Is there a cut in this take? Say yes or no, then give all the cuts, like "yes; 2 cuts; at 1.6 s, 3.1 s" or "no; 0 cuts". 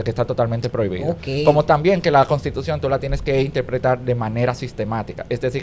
no; 0 cuts